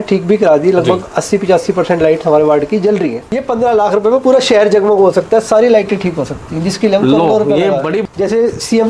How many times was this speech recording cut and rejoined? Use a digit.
2